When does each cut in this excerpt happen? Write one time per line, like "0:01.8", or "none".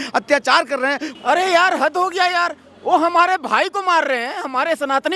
0:01.1